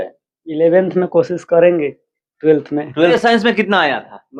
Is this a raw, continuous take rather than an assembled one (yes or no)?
no